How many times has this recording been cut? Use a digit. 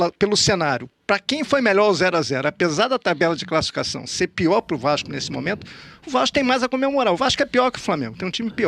0